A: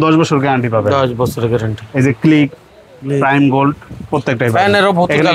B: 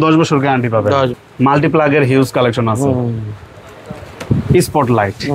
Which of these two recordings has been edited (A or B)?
B